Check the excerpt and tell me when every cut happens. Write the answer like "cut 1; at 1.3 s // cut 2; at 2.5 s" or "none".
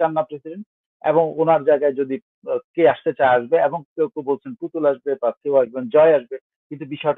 none

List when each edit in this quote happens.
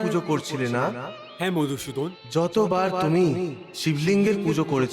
cut 1; at 2.2 s

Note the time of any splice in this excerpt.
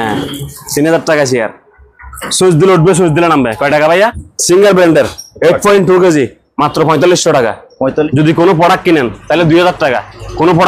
cut 1; at 4.3 s // cut 2; at 8.1 s

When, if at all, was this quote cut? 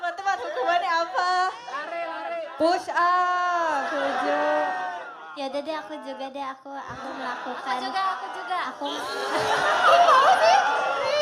none

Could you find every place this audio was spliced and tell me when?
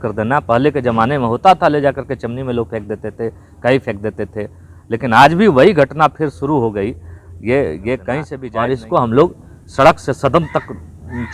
cut 1; at 8.4 s

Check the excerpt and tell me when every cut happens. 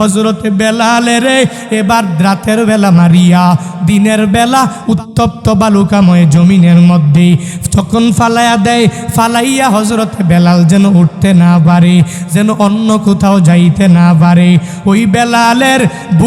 cut 1; at 4.8 s

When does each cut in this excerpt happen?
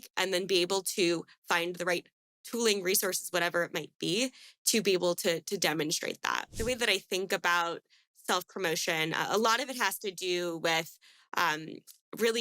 cut 1; at 6.5 s

